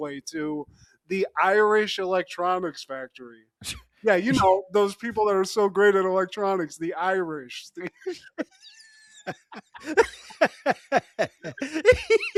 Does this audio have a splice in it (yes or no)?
no